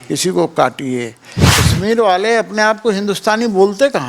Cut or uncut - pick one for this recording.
cut